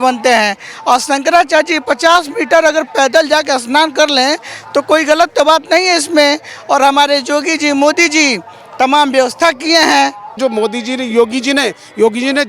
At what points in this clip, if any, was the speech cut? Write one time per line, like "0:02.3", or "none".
0:10.4